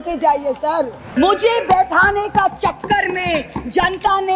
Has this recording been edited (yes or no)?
yes